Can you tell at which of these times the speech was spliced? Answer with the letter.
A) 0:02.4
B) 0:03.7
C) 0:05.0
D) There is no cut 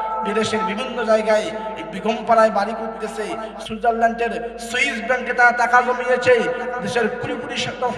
B